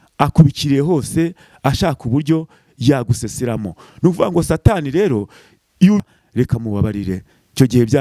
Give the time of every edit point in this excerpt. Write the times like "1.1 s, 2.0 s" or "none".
6.0 s